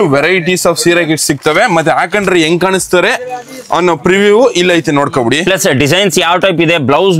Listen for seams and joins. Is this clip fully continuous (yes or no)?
yes